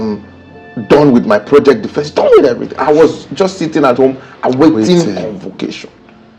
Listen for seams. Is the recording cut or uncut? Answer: uncut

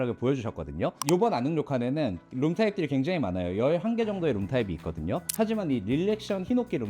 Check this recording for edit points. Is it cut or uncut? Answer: cut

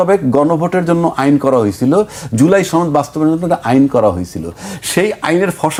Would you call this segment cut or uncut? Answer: uncut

